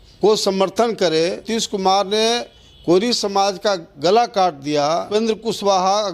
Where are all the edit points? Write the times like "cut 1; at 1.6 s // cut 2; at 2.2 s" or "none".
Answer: cut 1; at 1.5 s // cut 2; at 5.1 s